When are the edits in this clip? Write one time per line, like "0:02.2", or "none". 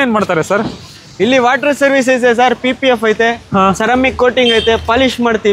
none